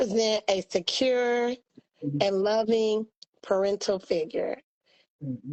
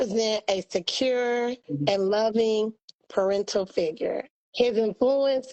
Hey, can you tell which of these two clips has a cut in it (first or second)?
second